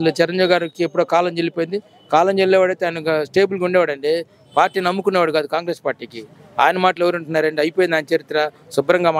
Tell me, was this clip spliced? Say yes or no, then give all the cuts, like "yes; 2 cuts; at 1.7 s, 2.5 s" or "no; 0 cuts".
no; 0 cuts